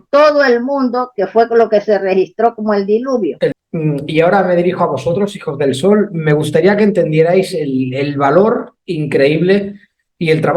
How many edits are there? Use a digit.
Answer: 1